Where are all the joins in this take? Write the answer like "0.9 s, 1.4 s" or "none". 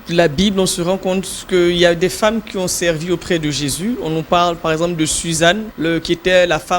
5.7 s